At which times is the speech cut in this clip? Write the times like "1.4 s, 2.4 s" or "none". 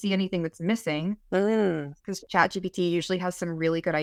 none

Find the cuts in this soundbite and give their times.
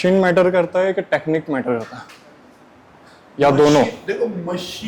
none

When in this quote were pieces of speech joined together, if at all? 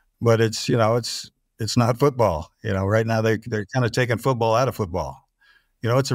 none

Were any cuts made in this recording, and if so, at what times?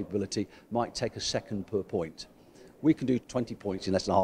3.2 s

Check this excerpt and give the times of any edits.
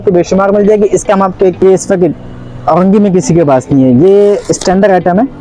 1.6 s

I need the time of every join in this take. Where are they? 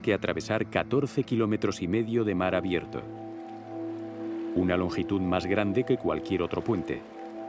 1.7 s

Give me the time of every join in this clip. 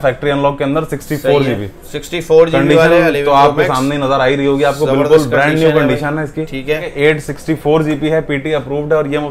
6.9 s

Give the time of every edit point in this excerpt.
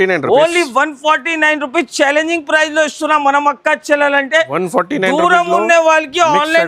none

